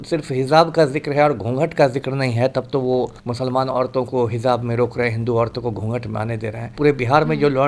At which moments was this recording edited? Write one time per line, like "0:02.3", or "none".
0:03.2
0:06.7